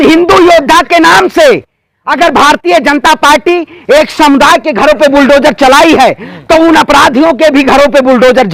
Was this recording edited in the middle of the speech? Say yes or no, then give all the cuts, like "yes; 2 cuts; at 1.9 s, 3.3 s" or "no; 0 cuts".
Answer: no; 0 cuts